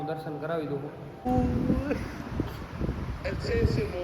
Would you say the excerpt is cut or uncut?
cut